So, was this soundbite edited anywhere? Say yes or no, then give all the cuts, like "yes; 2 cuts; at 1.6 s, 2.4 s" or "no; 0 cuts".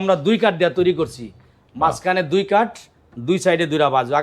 no; 0 cuts